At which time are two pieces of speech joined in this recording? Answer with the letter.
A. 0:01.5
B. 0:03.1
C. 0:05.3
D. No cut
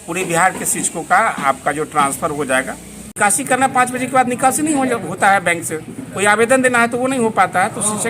B